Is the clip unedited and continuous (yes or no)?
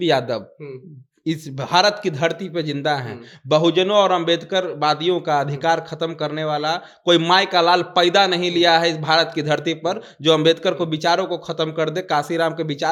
yes